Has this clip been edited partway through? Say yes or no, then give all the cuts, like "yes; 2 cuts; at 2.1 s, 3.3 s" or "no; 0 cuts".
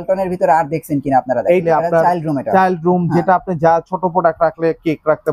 yes; 1 cut; at 1.6 s